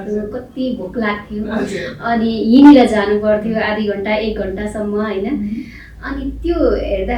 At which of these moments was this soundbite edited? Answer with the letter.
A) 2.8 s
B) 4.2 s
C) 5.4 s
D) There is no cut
D